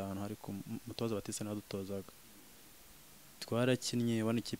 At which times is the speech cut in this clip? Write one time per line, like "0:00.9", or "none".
none